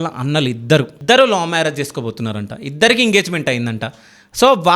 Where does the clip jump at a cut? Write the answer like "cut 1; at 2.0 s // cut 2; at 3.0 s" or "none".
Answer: cut 1; at 0.9 s